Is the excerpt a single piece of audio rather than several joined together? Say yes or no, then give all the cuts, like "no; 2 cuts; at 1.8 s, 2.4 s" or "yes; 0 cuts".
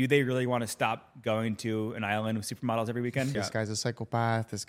no; 1 cut; at 3.3 s